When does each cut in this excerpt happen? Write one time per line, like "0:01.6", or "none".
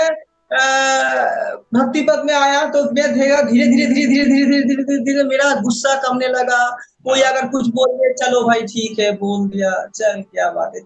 none

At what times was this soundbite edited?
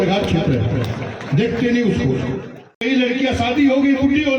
0:02.8

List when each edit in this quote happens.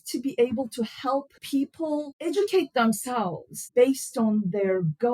0:01.7
0:03.7

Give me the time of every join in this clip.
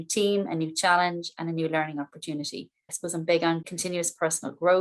0:02.9
0:03.7

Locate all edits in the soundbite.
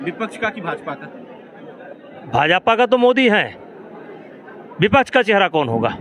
none

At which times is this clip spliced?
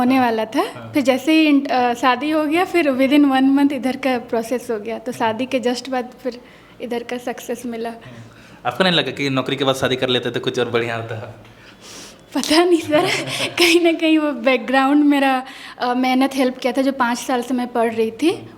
none

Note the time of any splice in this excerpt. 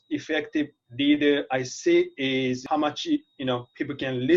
none

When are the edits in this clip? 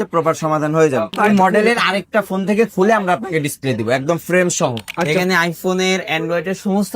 0:01.2
0:05.1

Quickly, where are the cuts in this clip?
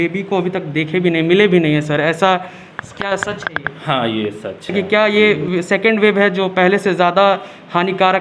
0:04.7

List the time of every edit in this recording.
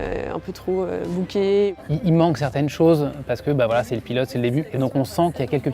0:01.8
0:04.7

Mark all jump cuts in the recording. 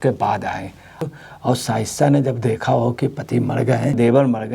0:01.1

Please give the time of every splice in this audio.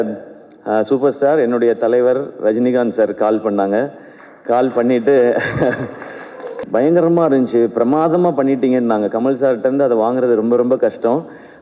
0:06.6

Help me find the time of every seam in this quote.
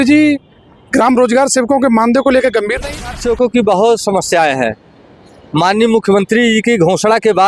0:03.1

